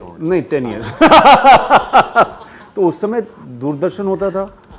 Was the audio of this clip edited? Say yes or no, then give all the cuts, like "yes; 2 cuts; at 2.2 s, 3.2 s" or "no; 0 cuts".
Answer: no; 0 cuts